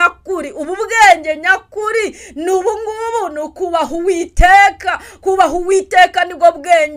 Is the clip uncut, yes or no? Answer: yes